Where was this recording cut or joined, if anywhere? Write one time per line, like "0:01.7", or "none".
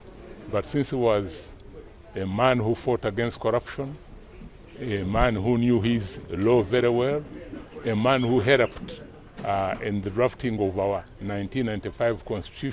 none